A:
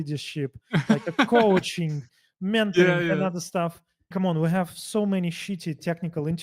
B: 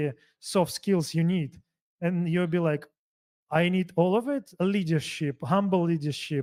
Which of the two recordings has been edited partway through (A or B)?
A